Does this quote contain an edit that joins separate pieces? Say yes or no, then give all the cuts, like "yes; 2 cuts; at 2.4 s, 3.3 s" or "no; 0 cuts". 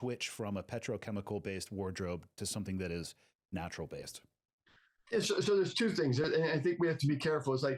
no; 0 cuts